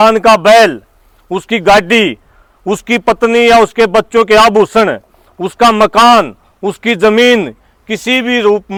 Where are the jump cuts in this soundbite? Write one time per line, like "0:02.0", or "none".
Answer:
none